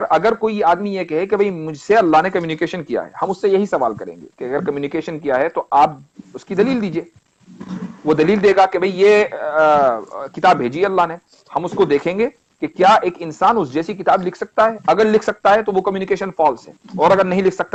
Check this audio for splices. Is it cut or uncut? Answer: uncut